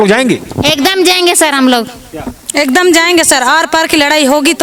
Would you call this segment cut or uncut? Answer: uncut